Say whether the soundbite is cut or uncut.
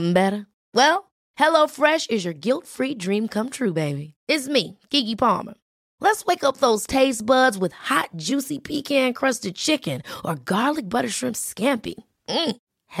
uncut